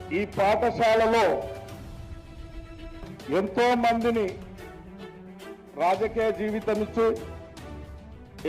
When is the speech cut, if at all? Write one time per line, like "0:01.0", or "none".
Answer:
0:01.6
0:03.0